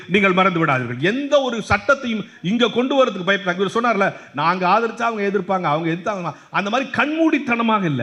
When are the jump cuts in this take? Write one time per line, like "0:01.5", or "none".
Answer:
none